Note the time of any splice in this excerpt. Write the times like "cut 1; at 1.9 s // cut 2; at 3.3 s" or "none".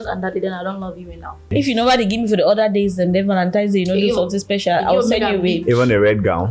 cut 1; at 1.5 s